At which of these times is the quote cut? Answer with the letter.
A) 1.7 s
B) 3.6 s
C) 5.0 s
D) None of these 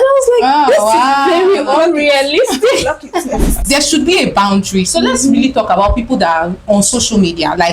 B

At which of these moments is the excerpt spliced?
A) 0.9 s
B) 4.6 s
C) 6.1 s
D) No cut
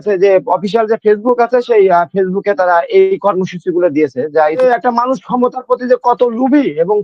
B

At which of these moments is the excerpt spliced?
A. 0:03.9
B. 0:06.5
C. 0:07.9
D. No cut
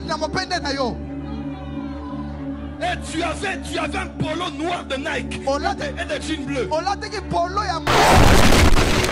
C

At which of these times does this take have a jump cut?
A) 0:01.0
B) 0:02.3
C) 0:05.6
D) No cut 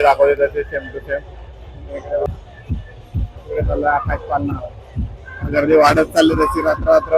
B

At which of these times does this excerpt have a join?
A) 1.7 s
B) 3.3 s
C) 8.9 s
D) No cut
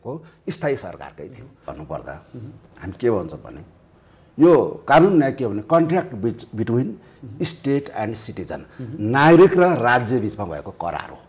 A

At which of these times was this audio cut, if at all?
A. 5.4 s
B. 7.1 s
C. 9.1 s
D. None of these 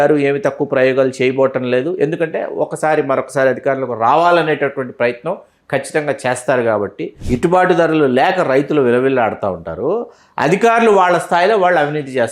B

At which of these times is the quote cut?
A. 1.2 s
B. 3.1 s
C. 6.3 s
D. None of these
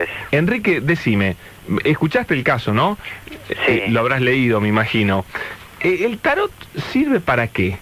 D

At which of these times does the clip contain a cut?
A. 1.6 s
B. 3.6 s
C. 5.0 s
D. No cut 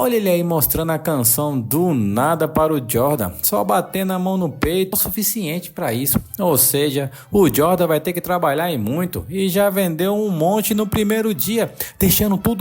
C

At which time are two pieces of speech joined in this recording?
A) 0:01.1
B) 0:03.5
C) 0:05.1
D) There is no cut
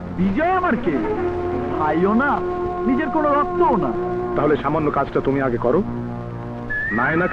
D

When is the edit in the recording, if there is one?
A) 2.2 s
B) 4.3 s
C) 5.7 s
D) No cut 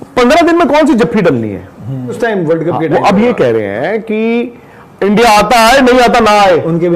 A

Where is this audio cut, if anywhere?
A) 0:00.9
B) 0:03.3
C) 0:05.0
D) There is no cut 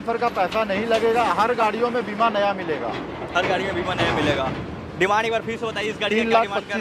D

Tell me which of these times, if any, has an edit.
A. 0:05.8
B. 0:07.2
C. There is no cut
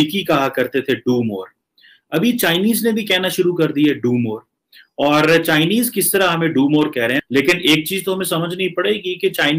B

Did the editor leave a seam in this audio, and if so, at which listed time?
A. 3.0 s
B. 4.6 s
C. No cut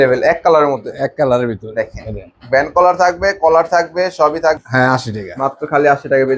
B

